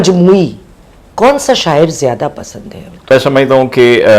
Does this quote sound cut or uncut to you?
cut